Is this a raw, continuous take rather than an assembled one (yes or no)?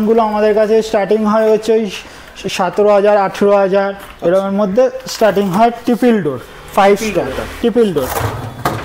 yes